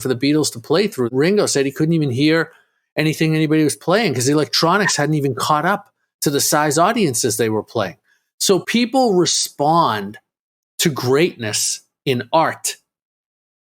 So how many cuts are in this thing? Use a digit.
2